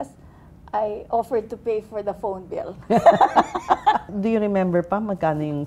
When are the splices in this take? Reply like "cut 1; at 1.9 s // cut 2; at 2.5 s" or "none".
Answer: none